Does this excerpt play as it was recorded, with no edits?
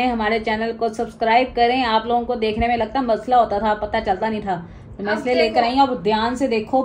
yes; 0 cuts

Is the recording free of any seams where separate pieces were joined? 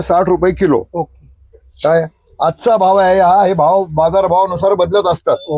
yes; 0 cuts

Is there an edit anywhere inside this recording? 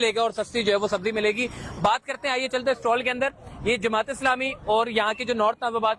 no; 0 cuts

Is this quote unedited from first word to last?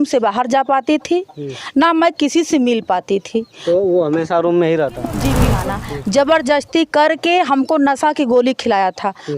no; 1 cut; at 5.5 s

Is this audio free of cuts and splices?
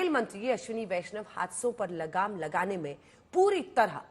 yes; 0 cuts

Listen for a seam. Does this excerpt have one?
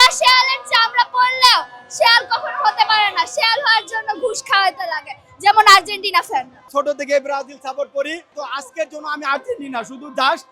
yes; 2 cuts; at 6.6 s, 8.4 s

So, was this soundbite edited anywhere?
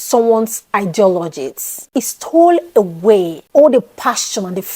yes; 2 cuts; at 1.8 s, 3.4 s

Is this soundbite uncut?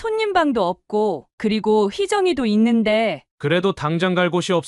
no; 1 cut; at 3.2 s

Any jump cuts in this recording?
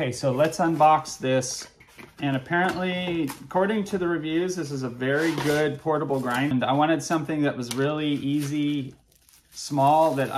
yes; 2 cuts; at 1.6 s, 6.5 s

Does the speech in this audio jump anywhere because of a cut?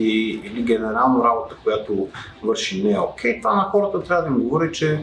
no; 0 cuts

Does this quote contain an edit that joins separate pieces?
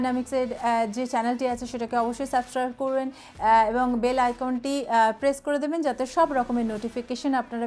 no; 0 cuts

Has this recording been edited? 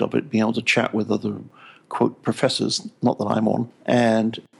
no; 0 cuts

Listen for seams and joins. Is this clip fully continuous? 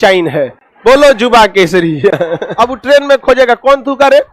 no; 1 cut; at 2.4 s

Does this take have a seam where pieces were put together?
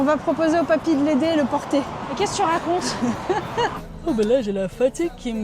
yes; 2 cuts; at 2.1 s, 3.8 s

